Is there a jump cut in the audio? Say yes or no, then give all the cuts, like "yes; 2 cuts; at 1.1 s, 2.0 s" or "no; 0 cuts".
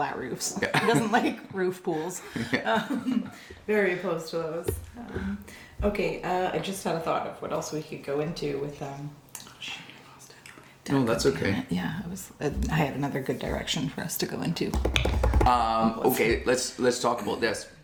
no; 0 cuts